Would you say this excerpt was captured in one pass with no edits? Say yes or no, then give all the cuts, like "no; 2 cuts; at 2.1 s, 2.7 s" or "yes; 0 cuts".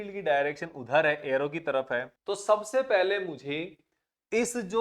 no; 1 cut; at 2.1 s